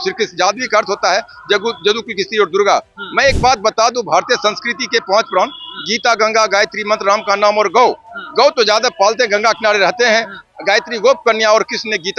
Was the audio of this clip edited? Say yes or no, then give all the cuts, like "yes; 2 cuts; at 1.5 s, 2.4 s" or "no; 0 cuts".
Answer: no; 0 cuts